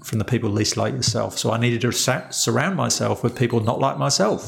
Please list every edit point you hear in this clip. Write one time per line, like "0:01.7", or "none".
none